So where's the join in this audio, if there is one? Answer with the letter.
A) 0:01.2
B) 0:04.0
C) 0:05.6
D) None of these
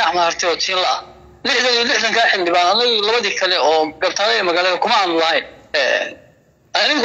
C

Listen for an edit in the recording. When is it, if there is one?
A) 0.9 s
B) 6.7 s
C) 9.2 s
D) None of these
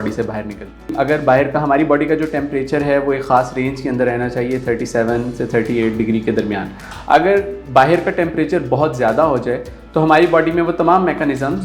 A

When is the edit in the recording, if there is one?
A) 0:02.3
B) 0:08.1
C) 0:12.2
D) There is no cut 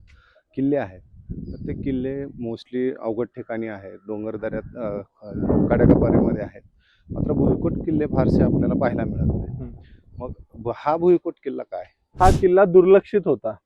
C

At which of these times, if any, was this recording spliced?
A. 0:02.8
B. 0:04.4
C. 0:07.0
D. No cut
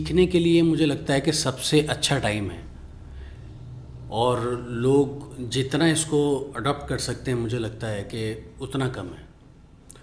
D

